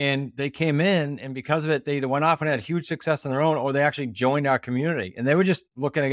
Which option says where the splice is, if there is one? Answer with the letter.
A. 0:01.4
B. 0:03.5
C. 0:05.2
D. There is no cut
D